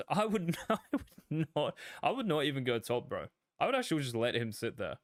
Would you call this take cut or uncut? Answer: uncut